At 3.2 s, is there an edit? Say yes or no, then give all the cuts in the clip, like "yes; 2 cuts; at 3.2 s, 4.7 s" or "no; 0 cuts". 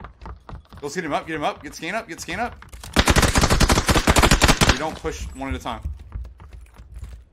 yes; 1 cut; at 3.2 s